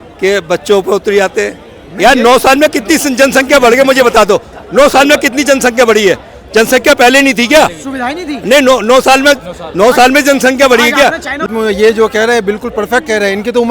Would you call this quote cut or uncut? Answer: cut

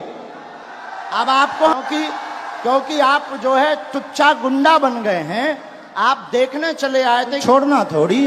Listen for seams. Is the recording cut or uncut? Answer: cut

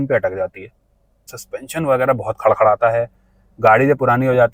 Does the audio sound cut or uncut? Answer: cut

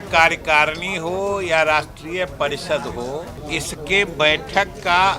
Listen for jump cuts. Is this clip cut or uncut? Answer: cut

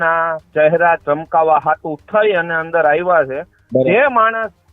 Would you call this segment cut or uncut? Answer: cut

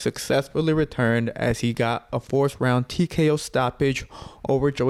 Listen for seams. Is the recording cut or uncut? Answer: uncut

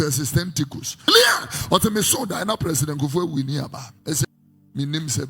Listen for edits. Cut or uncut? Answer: cut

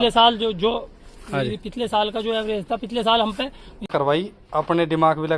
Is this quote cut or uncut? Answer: cut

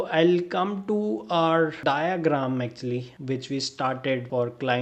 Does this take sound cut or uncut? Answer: uncut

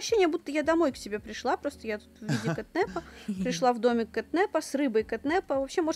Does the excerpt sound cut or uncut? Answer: uncut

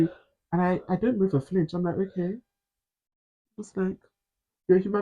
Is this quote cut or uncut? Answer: uncut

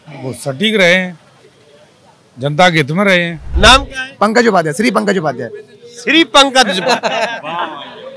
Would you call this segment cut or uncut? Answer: cut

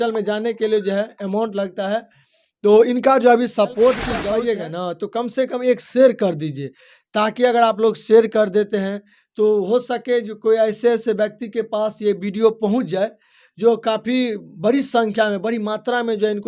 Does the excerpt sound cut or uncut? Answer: cut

